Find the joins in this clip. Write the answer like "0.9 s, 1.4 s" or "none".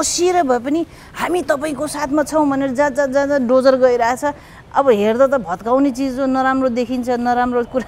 none